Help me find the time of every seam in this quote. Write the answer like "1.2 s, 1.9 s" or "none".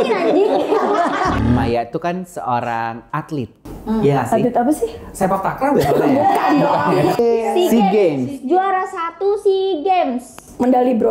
1.4 s, 7.1 s